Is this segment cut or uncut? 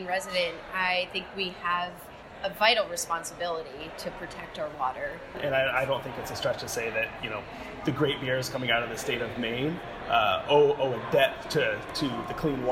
cut